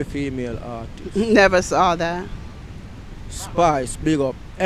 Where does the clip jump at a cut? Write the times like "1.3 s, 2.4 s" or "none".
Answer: none